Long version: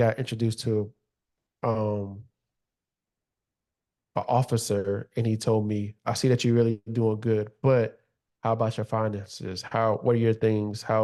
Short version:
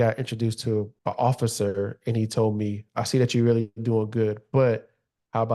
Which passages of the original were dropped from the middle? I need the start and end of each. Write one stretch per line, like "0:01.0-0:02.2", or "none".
0:00.9-0:04.0